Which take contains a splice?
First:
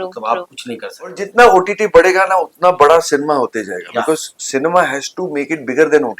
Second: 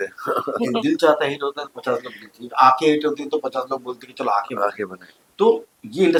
first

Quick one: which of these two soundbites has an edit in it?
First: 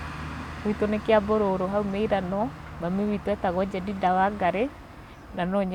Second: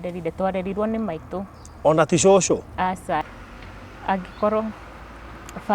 second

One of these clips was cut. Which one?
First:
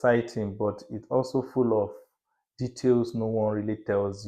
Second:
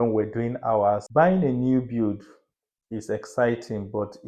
second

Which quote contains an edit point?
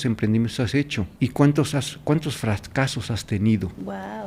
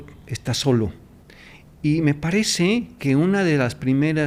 first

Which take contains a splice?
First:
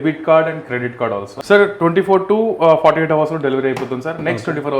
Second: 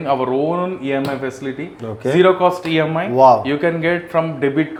first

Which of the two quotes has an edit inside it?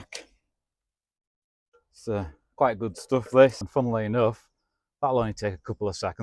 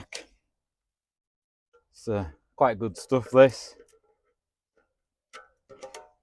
first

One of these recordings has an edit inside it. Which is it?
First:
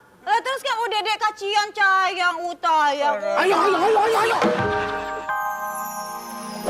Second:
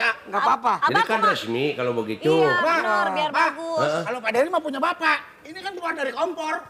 first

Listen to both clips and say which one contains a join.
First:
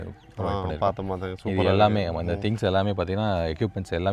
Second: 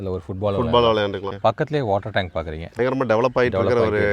second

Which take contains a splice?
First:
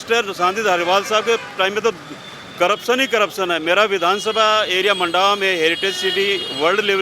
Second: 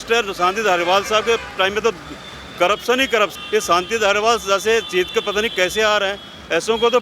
second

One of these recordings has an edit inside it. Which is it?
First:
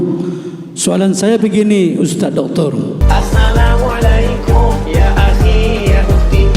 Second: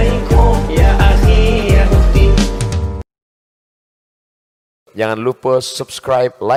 first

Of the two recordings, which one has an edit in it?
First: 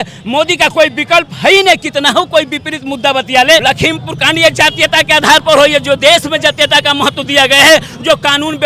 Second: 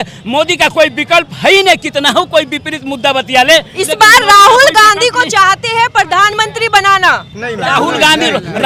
first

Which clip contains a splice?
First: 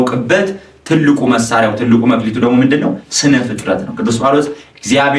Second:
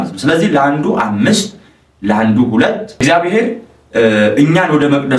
second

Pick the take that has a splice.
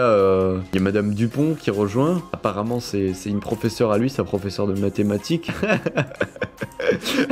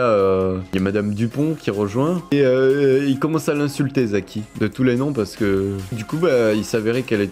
second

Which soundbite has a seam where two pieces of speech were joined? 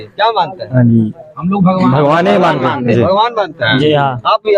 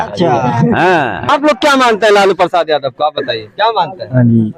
second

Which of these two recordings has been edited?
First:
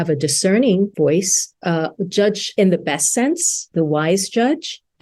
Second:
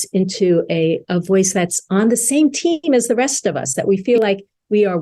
first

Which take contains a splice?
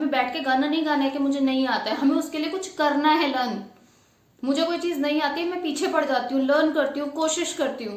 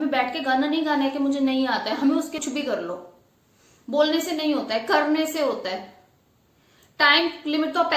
second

